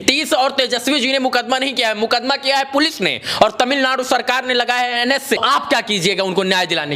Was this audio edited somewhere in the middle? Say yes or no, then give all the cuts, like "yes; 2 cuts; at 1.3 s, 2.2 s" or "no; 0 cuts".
yes; 1 cut; at 5.4 s